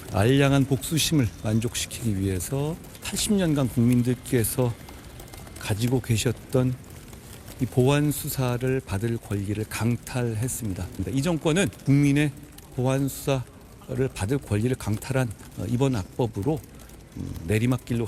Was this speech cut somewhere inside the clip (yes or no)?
yes